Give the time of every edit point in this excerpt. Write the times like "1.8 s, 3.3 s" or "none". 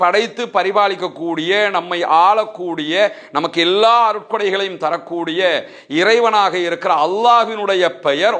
none